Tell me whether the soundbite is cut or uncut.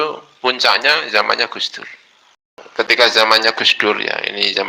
cut